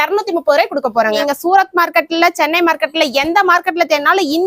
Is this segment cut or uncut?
cut